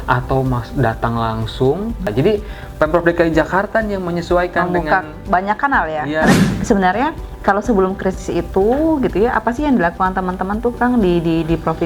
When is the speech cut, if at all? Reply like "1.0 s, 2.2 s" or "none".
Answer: 2.1 s, 6.3 s